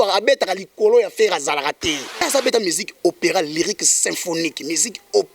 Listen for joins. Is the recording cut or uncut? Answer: cut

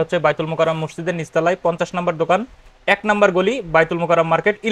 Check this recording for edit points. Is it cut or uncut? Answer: uncut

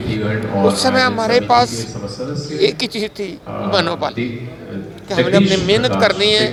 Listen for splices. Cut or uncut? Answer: uncut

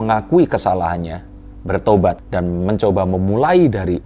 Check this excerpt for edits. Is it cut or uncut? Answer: uncut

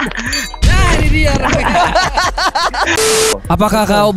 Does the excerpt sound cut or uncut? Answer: cut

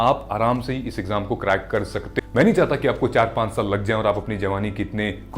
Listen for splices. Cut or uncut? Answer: cut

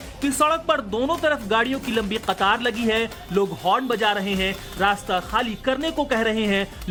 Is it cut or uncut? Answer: uncut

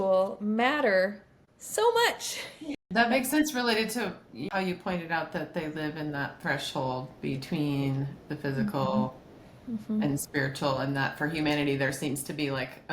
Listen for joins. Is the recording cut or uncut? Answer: cut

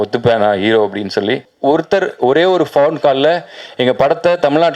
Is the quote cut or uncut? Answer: cut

